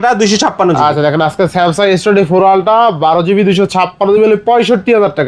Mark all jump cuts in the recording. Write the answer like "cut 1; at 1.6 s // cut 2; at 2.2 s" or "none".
none